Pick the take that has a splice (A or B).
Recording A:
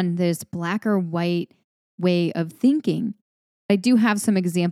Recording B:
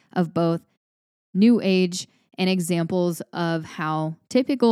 A